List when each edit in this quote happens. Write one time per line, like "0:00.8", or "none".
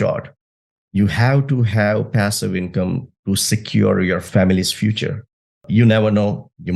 0:04.2
0:05.6